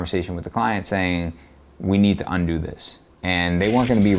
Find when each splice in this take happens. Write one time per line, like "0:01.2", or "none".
none